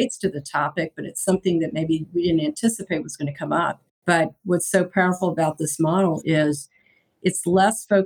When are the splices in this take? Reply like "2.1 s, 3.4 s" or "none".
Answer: 3.9 s